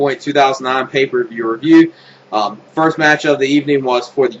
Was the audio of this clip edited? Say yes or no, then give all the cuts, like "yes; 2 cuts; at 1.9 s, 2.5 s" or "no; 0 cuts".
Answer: no; 0 cuts